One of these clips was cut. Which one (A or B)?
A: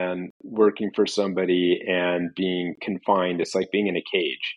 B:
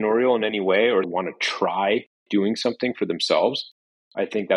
B